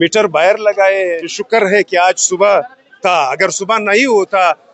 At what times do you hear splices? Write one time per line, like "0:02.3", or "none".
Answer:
0:01.3